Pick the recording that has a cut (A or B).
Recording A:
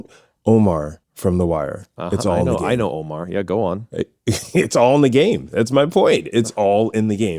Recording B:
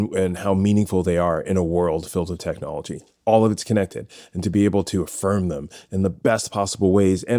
A